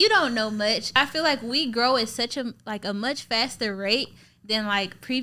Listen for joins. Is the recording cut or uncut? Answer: cut